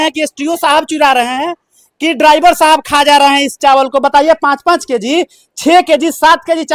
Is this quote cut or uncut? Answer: uncut